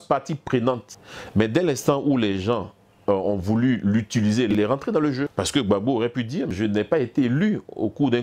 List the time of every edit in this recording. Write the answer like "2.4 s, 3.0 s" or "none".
0.9 s, 4.5 s, 5.3 s, 6.5 s